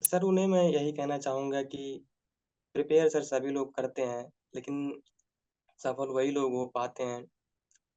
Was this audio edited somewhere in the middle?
no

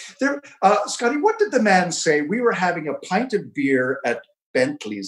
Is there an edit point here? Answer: no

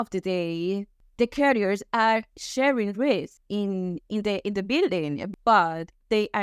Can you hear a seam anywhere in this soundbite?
yes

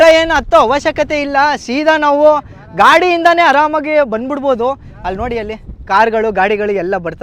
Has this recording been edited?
no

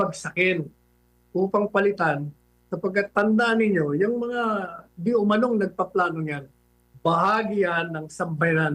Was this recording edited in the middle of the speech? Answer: no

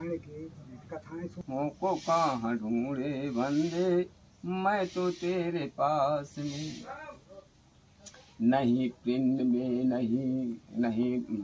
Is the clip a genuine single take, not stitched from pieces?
no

